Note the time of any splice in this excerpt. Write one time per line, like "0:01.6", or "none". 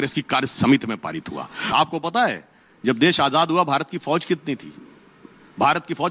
0:01.6